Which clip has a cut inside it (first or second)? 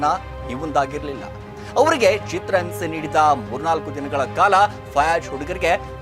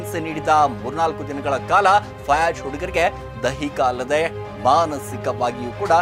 first